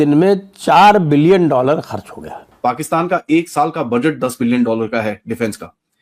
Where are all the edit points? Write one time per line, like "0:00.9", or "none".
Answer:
0:02.4